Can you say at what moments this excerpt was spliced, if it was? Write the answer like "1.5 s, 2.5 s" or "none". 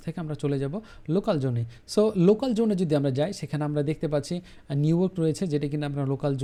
none

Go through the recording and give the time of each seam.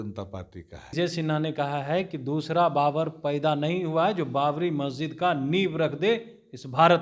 0.9 s

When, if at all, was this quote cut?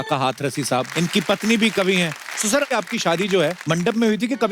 0.9 s, 2.7 s, 3.6 s

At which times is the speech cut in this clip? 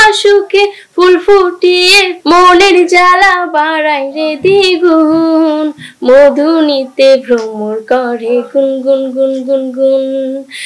2.1 s

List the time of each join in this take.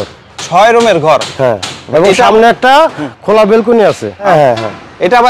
none

